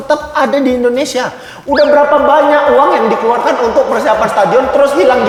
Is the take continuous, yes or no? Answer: yes